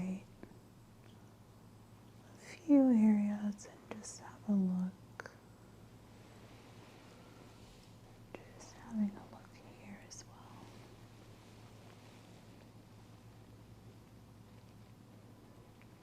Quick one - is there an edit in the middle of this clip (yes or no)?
yes